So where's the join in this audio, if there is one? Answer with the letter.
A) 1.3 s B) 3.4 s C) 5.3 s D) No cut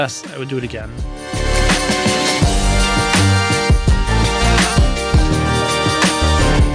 A